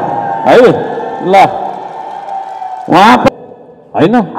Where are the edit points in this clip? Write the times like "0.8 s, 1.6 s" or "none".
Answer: 3.3 s